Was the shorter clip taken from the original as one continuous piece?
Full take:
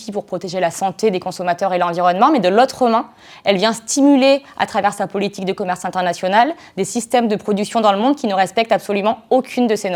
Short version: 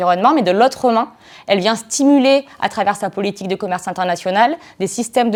yes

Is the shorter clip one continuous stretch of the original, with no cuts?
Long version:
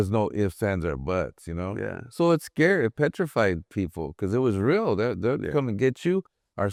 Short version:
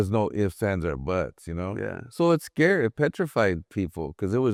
yes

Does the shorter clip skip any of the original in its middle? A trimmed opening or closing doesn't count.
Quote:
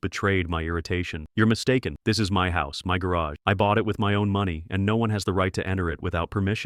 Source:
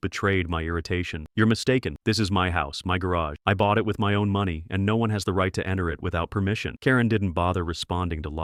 no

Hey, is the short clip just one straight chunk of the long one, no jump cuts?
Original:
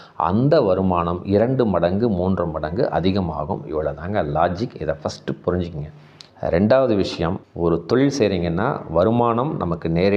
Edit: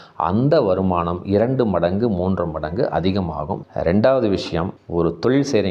no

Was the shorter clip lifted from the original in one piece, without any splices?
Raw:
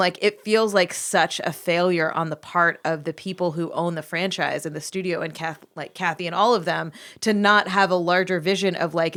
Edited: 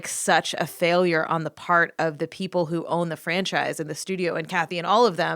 no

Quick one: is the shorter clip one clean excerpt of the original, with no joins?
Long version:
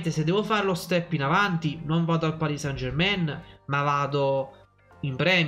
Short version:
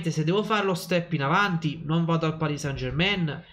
yes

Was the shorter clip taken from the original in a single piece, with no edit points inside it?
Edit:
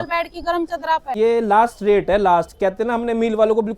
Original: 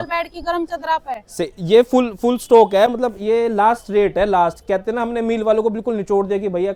no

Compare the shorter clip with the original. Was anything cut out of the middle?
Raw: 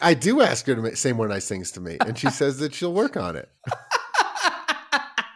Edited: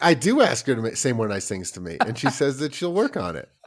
no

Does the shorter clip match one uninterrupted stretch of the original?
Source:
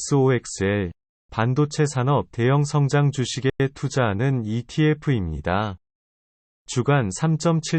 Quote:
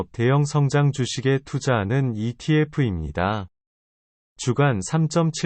no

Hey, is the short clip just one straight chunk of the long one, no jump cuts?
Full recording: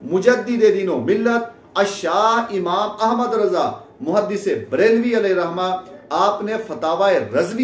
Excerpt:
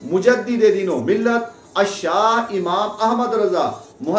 yes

